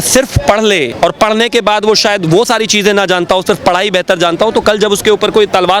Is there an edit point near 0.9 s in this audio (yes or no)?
yes